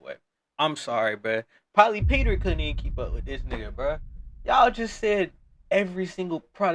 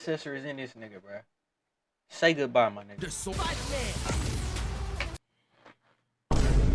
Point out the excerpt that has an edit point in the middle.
second; 1 cut; at 3.3 s

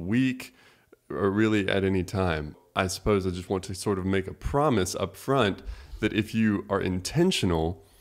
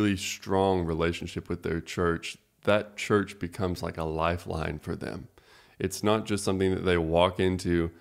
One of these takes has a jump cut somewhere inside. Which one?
first; 1 cut; at 2.6 s

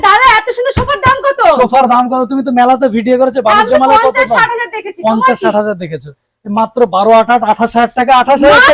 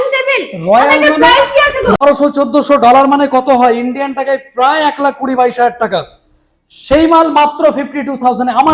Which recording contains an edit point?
second; 1 cut; at 2.0 s

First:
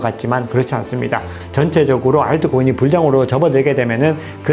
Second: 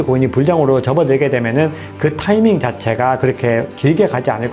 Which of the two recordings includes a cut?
first; 1 cut; at 1.4 s

